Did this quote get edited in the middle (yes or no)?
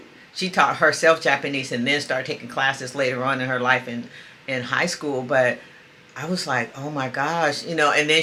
no